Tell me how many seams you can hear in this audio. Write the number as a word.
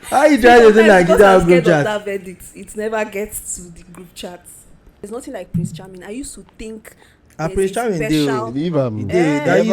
one